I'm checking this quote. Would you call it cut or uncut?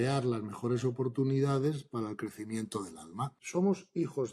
cut